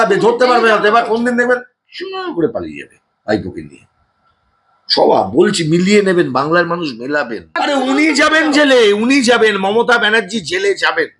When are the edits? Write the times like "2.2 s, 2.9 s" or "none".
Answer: 7.6 s